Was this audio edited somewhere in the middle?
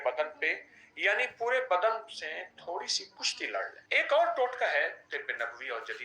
yes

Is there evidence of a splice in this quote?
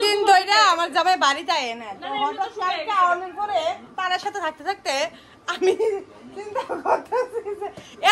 no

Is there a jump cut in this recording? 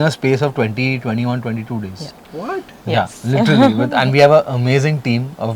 no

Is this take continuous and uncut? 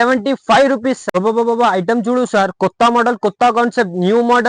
no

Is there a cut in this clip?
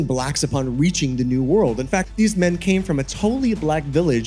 yes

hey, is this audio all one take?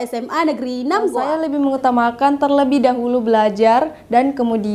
no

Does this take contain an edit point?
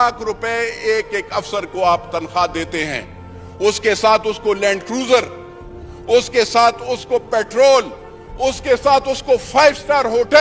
no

